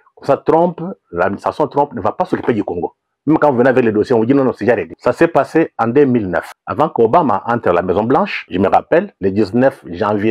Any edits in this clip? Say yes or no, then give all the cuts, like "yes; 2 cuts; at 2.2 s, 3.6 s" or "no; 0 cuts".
yes; 4 cuts; at 4.9 s, 6.6 s, 8.4 s, 9.1 s